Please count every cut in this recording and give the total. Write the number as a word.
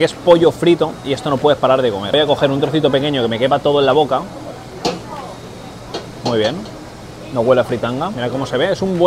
zero